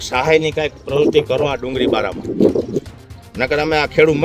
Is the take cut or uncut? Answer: uncut